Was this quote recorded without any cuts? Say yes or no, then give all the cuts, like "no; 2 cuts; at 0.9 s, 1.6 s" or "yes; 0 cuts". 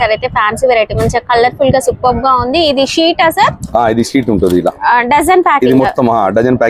yes; 0 cuts